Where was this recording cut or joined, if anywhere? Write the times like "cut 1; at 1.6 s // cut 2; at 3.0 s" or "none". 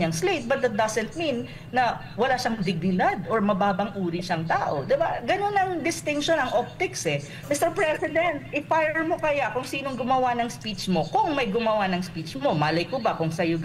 cut 1; at 7.4 s